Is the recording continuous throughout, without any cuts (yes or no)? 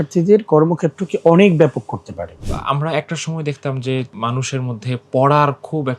no